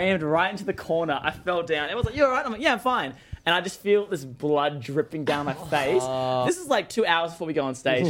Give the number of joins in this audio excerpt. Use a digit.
1